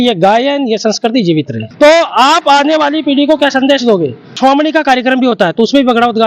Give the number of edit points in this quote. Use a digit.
2